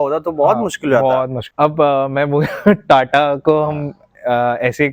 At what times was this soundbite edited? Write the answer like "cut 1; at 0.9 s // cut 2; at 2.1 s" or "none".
cut 1; at 1.4 s

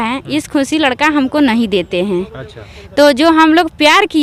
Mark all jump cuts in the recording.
none

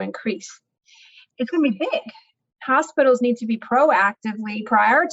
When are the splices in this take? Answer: cut 1; at 1.3 s // cut 2; at 2.3 s

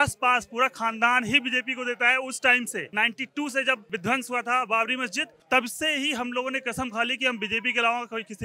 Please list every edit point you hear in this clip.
cut 1; at 2.9 s // cut 2; at 3.8 s // cut 3; at 5.3 s

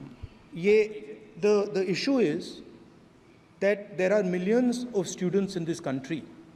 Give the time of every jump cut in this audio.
none

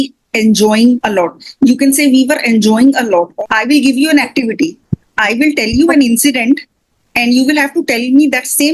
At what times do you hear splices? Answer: cut 1; at 1.0 s // cut 2; at 3.3 s

